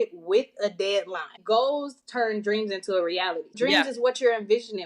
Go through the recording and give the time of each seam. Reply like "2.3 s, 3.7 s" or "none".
1.3 s, 3.6 s